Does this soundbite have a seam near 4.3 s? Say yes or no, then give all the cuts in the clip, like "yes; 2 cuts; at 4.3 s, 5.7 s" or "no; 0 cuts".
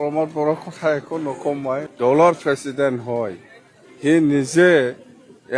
no; 1 cut; at 1.9 s